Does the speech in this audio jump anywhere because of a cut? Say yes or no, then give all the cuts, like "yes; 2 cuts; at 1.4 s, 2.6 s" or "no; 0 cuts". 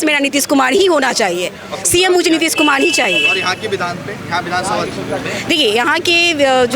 no; 0 cuts